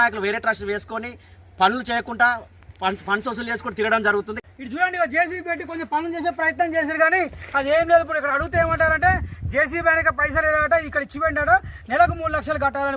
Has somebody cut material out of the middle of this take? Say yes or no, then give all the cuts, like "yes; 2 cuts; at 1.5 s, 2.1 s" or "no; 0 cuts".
yes; 1 cut; at 4.4 s